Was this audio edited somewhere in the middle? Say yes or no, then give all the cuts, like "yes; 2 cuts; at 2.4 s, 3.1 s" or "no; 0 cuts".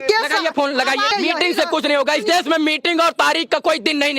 yes; 1 cut; at 1.1 s